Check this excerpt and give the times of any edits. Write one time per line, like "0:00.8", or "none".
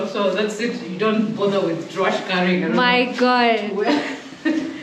none